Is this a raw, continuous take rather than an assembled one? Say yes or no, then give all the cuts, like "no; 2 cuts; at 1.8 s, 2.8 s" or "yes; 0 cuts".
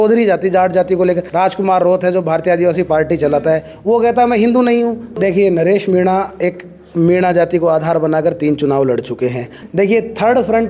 no; 3 cuts; at 1.3 s, 5.0 s, 9.5 s